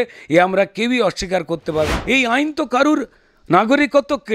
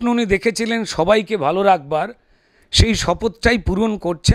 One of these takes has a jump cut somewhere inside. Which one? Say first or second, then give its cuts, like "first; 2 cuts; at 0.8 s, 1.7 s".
first; 1 cut; at 1.9 s